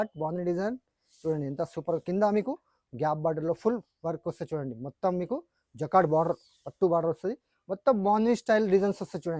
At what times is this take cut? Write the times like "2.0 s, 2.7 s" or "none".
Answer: none